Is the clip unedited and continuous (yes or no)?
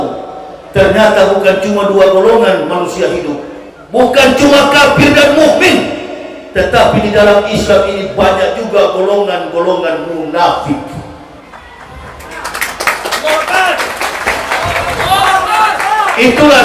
no